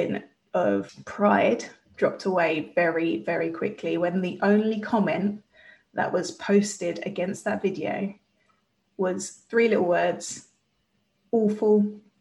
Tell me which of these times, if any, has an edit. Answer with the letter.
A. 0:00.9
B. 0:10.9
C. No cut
A